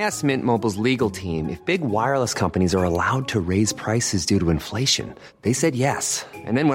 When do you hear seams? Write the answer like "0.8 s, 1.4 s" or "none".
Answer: none